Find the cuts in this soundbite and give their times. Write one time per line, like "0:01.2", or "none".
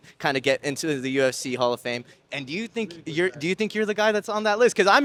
none